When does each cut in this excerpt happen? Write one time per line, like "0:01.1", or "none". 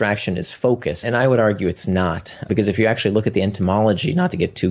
0:01.0
0:02.5